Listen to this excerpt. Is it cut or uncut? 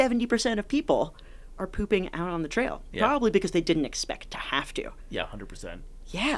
uncut